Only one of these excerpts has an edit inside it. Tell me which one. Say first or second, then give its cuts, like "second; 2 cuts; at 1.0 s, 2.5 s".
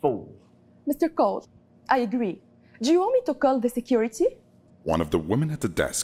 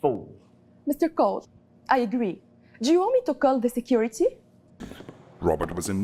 second; 1 cut; at 4.8 s